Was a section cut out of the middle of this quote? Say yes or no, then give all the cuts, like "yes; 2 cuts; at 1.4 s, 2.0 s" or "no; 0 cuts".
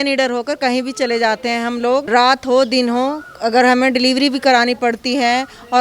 yes; 1 cut; at 2.1 s